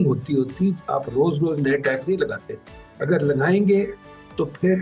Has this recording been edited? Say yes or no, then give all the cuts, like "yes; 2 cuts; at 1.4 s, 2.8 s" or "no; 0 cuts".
no; 0 cuts